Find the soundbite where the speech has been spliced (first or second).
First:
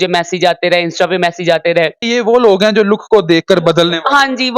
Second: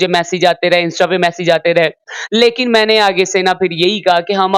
first